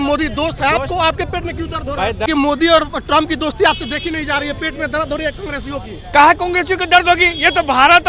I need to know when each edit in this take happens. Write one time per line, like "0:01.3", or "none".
0:02.2